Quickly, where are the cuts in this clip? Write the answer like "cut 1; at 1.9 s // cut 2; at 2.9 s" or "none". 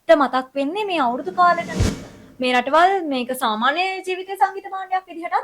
cut 1; at 2.2 s

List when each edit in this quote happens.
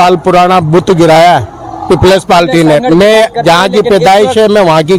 none

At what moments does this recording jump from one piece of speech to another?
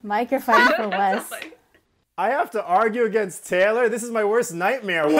cut 1; at 2.0 s

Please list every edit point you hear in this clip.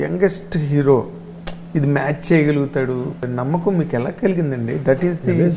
cut 1; at 3.3 s

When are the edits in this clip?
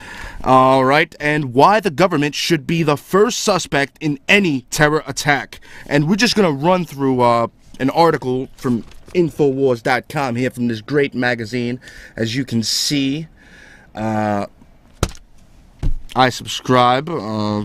cut 1; at 8.2 s

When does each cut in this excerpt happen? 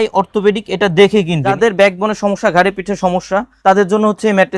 cut 1; at 1.6 s // cut 2; at 3.5 s

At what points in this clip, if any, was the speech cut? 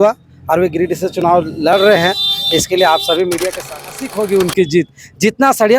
cut 1; at 3.8 s

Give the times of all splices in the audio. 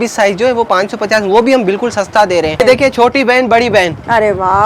cut 1; at 2.6 s

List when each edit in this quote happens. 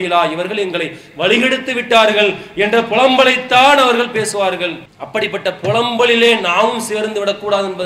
none

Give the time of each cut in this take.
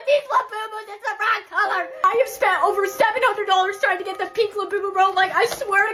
none

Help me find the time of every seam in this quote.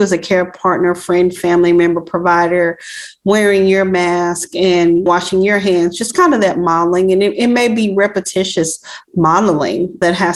none

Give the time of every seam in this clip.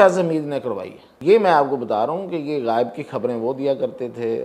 cut 1; at 1.1 s

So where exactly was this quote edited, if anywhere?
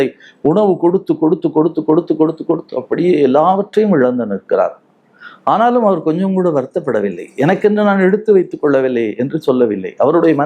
none

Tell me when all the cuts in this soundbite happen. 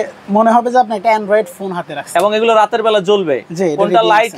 none

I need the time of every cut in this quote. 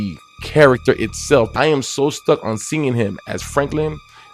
cut 1; at 1.5 s

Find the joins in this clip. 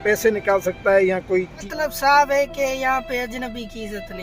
cut 1; at 1.6 s

